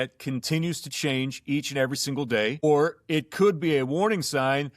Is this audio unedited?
no; 1 cut; at 2.6 s

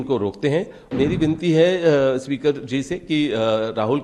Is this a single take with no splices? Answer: no; 1 cut; at 0.9 s

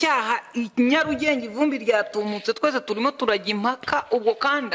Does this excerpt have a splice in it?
no; 0 cuts

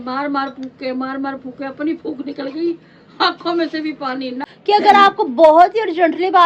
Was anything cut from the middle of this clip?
yes; 2 cuts; at 2.8 s, 4.5 s

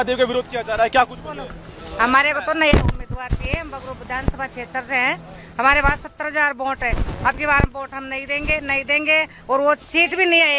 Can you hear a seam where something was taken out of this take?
no; 0 cuts

